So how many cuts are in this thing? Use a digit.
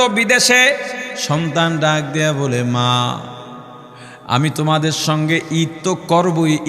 1